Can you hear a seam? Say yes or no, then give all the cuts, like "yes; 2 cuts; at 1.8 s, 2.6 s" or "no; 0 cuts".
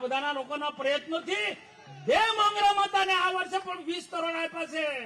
no; 0 cuts